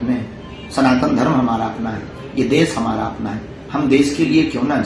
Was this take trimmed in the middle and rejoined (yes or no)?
no